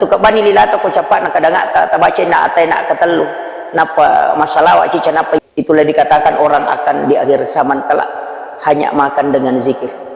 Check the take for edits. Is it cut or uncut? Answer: cut